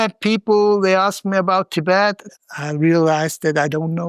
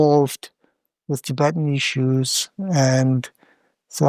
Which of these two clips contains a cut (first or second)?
first